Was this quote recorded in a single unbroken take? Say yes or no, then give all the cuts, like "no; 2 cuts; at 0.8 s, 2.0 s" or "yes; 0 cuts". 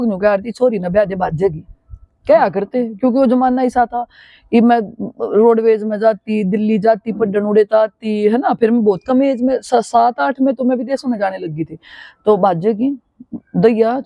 yes; 0 cuts